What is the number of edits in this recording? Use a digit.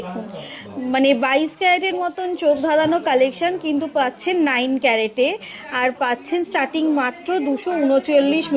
0